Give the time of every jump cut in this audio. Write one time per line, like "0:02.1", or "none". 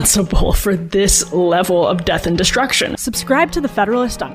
0:03.1